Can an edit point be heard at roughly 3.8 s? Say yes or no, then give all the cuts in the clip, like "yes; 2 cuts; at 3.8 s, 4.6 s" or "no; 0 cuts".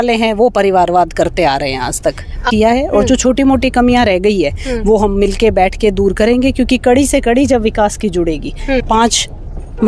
no; 2 cuts; at 2.4 s, 8.8 s